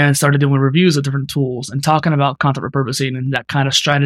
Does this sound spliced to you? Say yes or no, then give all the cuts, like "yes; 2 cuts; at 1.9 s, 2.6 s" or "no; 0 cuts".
no; 0 cuts